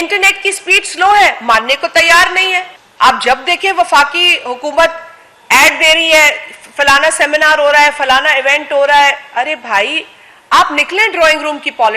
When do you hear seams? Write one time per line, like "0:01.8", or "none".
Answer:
0:02.8

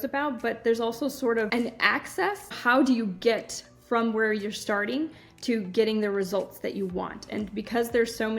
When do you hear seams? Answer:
0:01.5
0:02.6

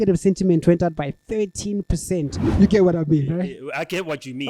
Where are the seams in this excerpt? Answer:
0:02.4

